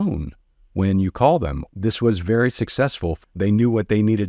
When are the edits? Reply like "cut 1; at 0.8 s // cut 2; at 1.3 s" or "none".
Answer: cut 1; at 1.6 s // cut 2; at 3.1 s